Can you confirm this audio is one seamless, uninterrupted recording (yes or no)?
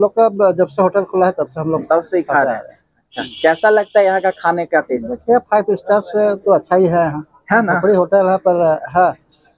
yes